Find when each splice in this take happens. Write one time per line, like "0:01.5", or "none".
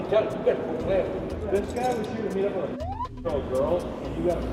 0:01.3